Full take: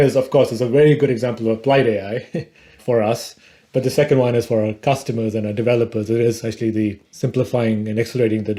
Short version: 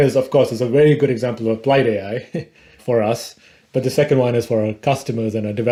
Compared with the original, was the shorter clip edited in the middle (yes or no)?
no